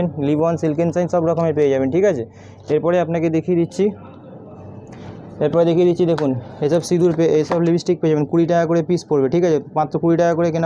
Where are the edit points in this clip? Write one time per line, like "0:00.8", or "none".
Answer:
none